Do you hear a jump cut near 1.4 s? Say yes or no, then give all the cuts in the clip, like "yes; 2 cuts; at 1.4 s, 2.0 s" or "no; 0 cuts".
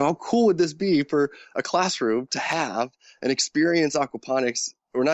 no; 0 cuts